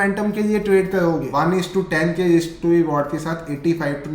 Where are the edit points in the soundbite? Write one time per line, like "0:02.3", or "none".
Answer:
0:01.3